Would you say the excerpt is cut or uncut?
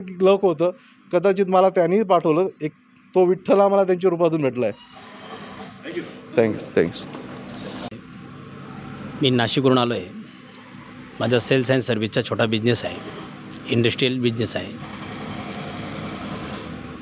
uncut